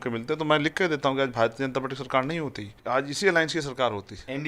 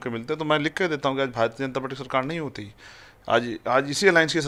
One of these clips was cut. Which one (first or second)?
first